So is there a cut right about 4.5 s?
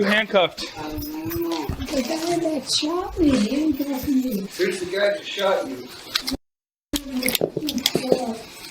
no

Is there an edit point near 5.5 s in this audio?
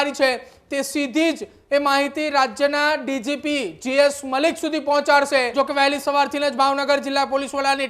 yes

